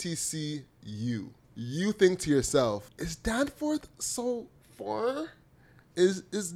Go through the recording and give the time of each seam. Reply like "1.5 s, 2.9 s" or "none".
1.4 s, 2.9 s

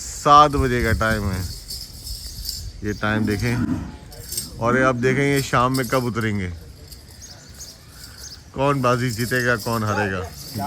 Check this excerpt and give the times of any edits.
none

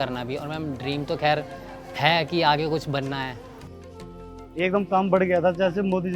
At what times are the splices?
3.9 s

